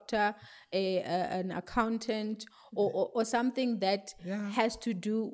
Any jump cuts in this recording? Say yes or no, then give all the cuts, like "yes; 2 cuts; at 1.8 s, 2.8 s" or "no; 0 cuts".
no; 0 cuts